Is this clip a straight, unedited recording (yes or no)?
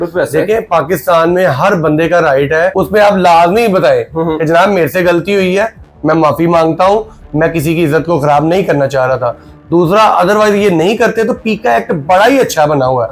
no